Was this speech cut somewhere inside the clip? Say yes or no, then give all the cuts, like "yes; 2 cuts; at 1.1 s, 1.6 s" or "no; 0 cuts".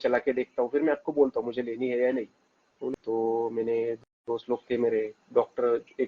yes; 1 cut; at 3.0 s